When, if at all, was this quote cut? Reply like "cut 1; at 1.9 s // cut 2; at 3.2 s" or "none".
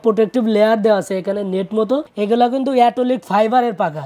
cut 1; at 2.1 s